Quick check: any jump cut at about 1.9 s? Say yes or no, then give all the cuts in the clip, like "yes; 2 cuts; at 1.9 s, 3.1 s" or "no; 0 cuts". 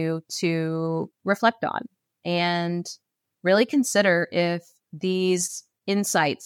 no; 0 cuts